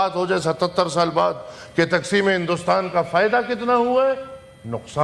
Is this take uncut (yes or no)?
yes